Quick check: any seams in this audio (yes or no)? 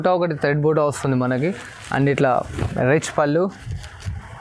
no